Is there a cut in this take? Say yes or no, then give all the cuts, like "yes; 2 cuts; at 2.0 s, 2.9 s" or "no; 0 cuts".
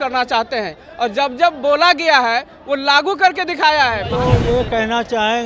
yes; 1 cut; at 4.1 s